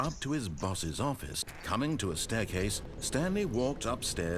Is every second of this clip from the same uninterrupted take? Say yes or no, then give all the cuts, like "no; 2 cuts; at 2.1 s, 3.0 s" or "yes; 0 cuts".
no; 1 cut; at 1.6 s